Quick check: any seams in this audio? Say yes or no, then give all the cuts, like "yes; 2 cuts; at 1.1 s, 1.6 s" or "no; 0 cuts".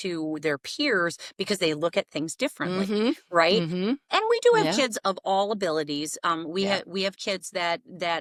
no; 0 cuts